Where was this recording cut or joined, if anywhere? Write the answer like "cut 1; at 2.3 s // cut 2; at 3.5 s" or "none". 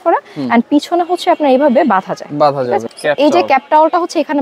cut 1; at 2.9 s